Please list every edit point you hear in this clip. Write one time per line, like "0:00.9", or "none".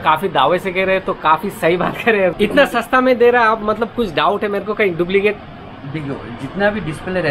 0:02.3